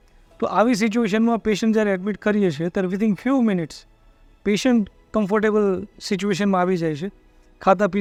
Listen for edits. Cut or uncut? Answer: uncut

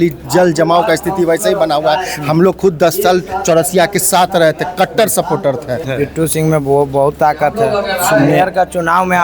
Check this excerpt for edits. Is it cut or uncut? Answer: cut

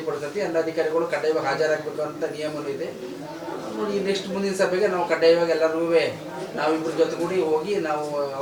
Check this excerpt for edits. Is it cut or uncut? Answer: uncut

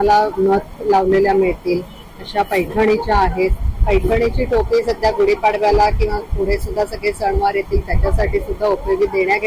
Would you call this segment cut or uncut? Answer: uncut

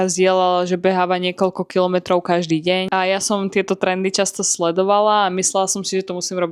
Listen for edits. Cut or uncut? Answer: uncut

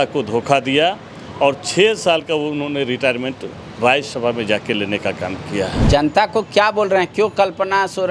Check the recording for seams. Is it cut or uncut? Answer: cut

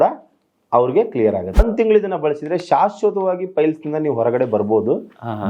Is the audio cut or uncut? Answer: cut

